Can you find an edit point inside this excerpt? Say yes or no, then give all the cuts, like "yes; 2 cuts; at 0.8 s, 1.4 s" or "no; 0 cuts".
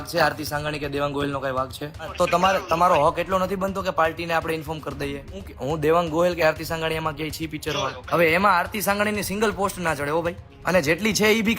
yes; 4 cuts; at 2.1 s, 5.5 s, 8.0 s, 10.5 s